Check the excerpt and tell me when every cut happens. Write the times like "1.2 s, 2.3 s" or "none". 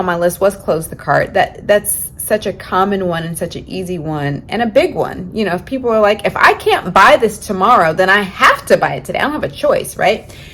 none